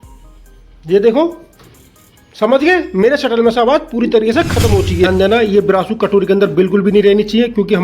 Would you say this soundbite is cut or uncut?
cut